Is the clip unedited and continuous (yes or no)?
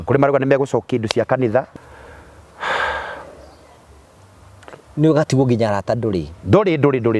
no